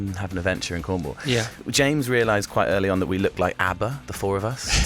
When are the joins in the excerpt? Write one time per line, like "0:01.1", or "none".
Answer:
0:01.6